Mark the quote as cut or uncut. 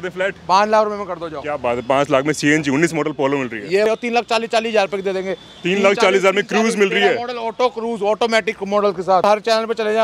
cut